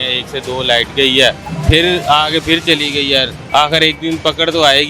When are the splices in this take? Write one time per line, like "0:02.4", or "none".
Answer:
0:01.5
0:03.4